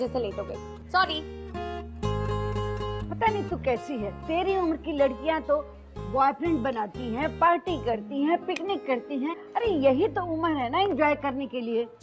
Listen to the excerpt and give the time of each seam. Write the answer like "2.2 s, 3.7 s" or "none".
7.3 s